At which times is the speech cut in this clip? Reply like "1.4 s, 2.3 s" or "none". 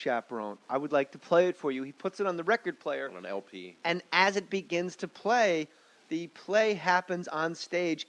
1.8 s